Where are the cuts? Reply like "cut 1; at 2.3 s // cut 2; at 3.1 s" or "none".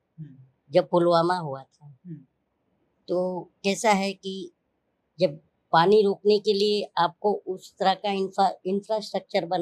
none